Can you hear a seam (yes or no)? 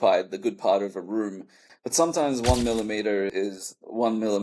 yes